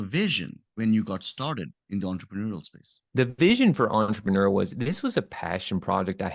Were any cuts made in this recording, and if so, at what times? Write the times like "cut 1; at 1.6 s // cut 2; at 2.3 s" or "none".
cut 1; at 3.0 s